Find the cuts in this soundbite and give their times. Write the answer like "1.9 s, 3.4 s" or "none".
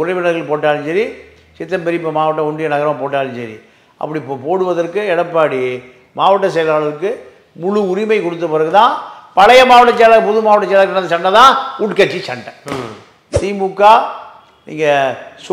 13.3 s